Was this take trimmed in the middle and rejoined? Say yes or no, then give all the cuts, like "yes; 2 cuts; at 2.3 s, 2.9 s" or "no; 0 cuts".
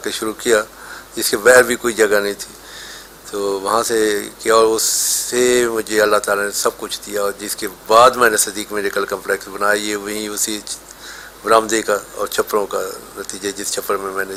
no; 0 cuts